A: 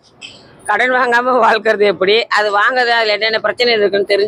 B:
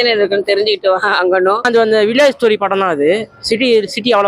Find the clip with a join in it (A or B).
B